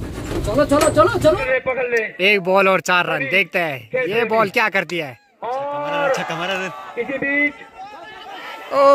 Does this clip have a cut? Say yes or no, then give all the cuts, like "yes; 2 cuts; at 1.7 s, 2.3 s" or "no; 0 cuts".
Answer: yes; 1 cut; at 1.3 s